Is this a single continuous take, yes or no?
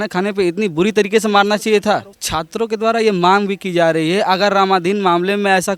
yes